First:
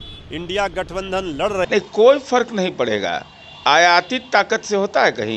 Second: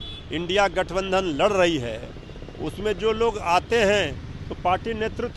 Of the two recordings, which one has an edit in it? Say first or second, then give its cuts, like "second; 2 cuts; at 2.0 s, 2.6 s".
first; 1 cut; at 1.7 s